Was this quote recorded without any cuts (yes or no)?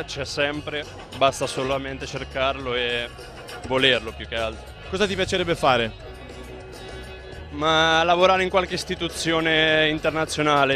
yes